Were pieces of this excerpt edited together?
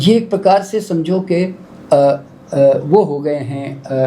no; 0 cuts

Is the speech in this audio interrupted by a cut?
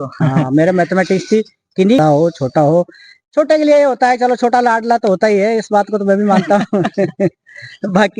yes; 1 cut; at 2.0 s

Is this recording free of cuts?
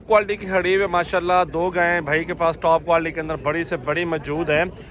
yes; 0 cuts

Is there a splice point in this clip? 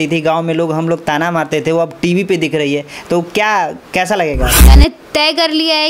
yes; 1 cut; at 4.7 s

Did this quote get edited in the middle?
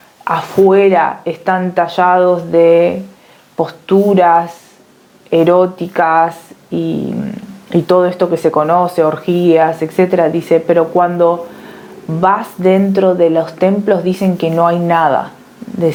no; 0 cuts

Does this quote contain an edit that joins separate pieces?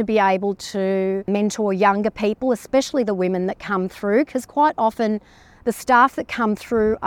yes; 1 cut; at 1.3 s

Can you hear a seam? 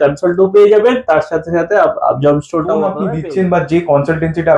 yes; 1 cut; at 3.0 s

